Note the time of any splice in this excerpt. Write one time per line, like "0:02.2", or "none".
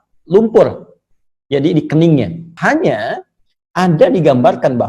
0:02.4